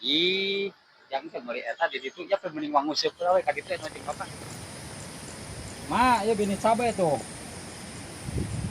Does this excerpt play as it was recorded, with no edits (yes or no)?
no